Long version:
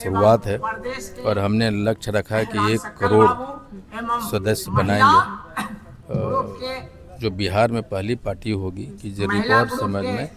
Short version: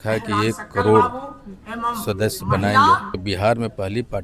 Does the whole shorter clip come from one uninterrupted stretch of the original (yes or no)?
no